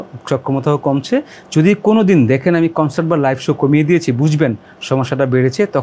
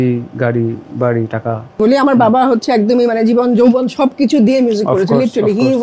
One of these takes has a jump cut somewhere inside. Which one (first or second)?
second